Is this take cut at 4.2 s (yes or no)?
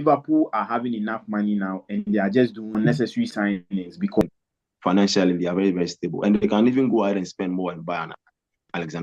yes